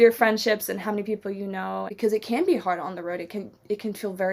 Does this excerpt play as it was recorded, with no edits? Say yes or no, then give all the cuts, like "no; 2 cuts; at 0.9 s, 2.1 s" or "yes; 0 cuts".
no; 1 cut; at 1.9 s